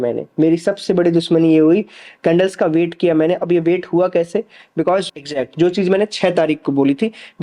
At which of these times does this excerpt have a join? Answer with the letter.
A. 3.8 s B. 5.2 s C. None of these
B